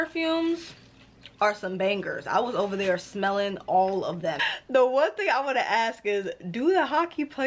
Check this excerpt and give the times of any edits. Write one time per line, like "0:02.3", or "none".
0:04.4